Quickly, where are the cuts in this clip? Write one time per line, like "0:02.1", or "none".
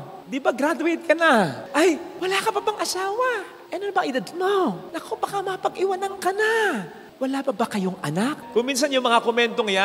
0:01.6
0:07.0
0:08.4